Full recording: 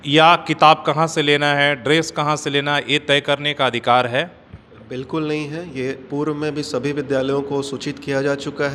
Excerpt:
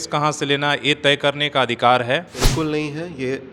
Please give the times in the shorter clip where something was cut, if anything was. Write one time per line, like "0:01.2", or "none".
0:02.4

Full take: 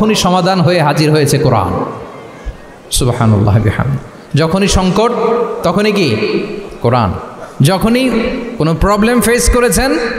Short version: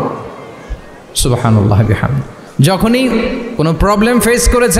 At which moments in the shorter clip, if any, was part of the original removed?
0:02.4

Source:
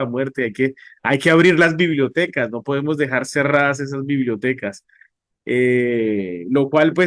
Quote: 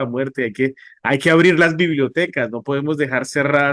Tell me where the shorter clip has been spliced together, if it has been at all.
none

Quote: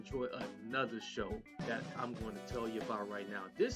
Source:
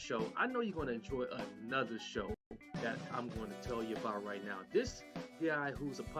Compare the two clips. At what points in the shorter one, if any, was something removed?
0:01.5

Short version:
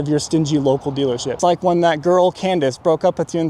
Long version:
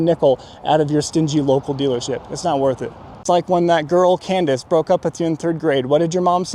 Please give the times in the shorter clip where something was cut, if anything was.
0:01.3

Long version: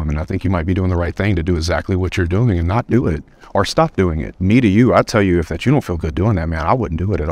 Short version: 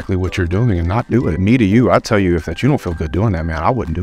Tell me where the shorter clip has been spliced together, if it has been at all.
0:01.4

